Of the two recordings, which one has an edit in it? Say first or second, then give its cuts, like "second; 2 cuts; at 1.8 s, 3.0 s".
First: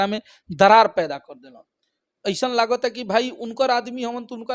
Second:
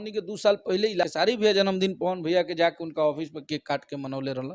second; 1 cut; at 1.0 s